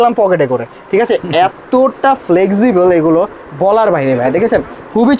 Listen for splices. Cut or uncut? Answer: uncut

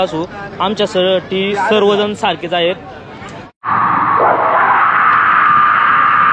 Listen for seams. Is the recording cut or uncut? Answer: uncut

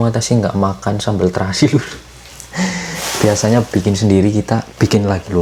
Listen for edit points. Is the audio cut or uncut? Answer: uncut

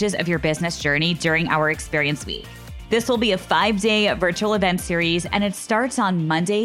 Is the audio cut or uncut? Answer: uncut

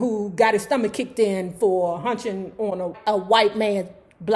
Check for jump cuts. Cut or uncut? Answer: cut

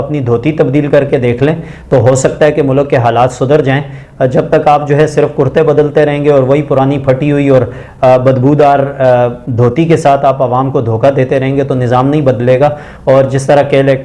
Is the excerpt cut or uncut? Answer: uncut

